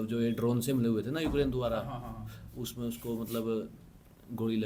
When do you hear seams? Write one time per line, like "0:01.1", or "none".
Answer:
none